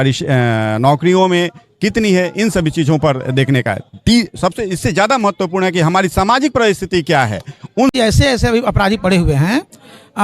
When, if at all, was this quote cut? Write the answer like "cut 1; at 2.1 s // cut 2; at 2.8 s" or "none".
cut 1; at 7.9 s